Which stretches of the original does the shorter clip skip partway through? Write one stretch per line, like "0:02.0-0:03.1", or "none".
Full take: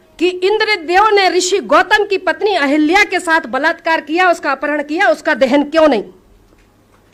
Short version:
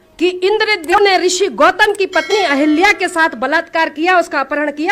0:00.9-0:01.1